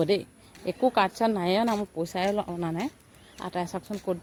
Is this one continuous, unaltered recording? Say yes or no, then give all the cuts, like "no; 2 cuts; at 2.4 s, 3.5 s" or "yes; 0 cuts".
yes; 0 cuts